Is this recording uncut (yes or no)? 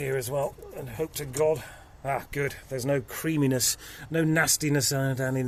yes